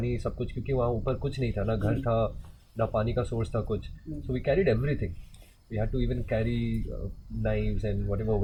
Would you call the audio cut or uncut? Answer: uncut